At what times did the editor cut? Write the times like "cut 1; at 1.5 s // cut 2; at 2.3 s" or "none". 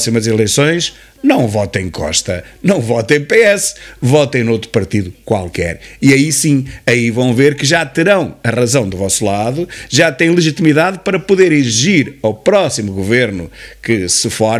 none

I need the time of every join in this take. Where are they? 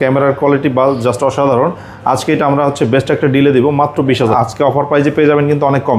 cut 1; at 4.3 s

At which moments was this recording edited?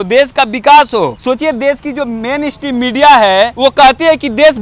cut 1; at 1.2 s // cut 2; at 3.5 s

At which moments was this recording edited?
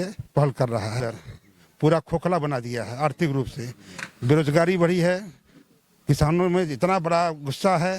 cut 1; at 1.0 s

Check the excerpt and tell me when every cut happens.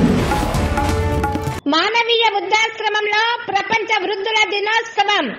cut 1; at 1.5 s

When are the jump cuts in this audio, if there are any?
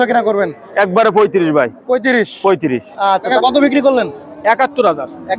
cut 1; at 3.3 s

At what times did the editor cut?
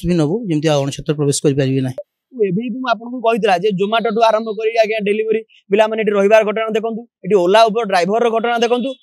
cut 1; at 2.2 s

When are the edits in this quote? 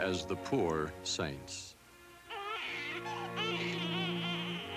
none

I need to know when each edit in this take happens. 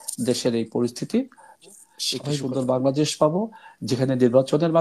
cut 1; at 2.3 s

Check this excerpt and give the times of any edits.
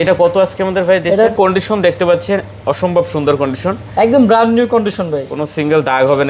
cut 1; at 1.3 s

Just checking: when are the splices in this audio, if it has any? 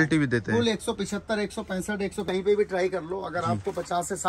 cut 1; at 2.2 s

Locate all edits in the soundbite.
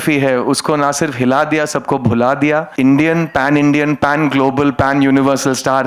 cut 1; at 2.7 s

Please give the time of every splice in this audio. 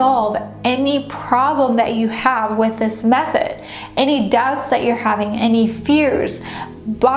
none

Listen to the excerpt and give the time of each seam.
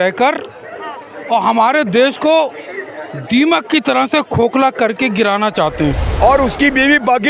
cut 1; at 6.1 s

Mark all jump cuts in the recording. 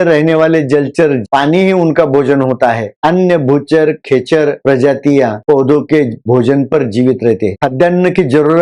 cut 1; at 1.2 s // cut 2; at 7.6 s

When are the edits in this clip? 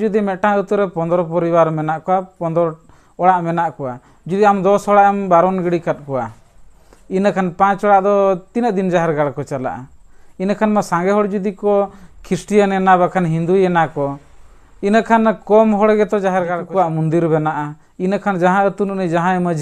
cut 1; at 16.6 s

